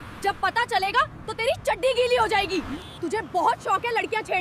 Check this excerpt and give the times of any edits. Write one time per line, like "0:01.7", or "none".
0:02.8